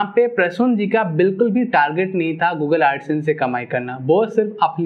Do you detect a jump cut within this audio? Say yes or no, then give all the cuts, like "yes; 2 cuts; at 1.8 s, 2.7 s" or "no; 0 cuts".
no; 0 cuts